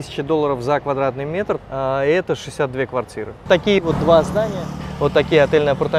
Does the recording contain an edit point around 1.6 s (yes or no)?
yes